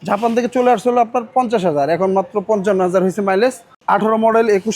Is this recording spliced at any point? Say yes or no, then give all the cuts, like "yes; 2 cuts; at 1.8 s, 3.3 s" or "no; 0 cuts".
yes; 1 cut; at 3.7 s